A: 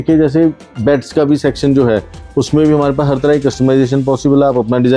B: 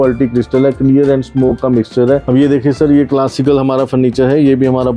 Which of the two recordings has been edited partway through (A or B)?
B